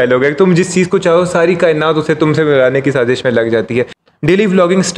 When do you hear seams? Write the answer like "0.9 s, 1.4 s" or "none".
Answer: 4.0 s